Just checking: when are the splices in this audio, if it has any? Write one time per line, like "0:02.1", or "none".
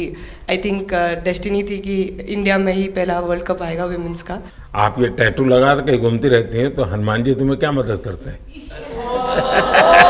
0:04.5